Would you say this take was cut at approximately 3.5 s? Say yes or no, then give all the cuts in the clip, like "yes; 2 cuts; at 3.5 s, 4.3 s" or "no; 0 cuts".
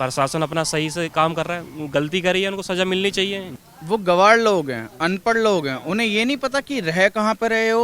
yes; 1 cut; at 3.5 s